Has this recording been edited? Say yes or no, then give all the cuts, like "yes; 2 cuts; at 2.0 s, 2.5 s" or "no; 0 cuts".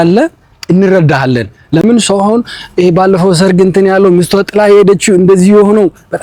no; 0 cuts